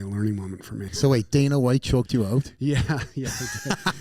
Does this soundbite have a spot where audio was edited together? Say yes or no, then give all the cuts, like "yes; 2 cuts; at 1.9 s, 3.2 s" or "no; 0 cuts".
yes; 1 cut; at 0.9 s